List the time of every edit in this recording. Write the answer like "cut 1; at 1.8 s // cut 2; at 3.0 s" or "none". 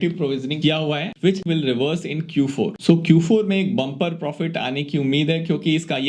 cut 1; at 1.4 s // cut 2; at 2.8 s